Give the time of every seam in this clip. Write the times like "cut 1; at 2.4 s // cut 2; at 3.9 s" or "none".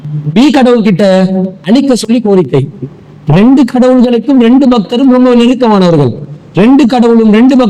none

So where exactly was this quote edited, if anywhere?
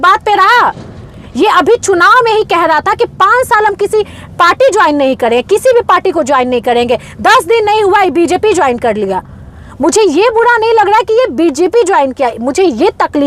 none

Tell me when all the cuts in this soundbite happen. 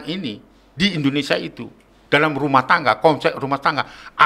none

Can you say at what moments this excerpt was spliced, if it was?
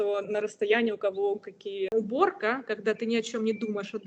cut 1; at 1.9 s

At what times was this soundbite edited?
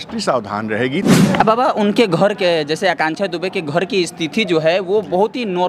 cut 1; at 1.0 s

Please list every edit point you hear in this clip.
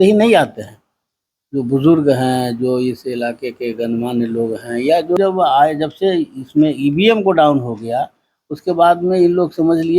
cut 1; at 5.2 s

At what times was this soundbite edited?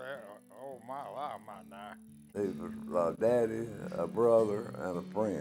cut 1; at 2.3 s

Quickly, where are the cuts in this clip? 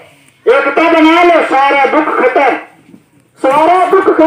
none

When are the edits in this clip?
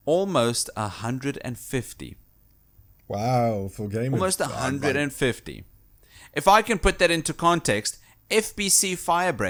none

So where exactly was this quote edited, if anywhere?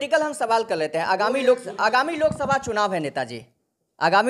none

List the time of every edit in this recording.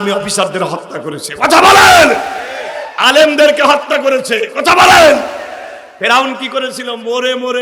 none

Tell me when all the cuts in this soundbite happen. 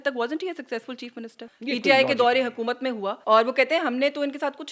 cut 1; at 1.4 s // cut 2; at 3.1 s

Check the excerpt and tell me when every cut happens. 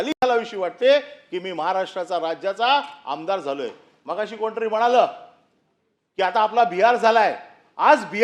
none

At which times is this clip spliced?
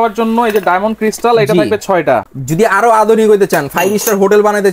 none

